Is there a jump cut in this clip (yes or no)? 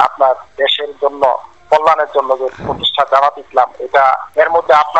no